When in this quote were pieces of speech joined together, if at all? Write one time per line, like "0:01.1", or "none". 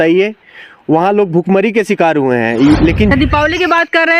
0:03.1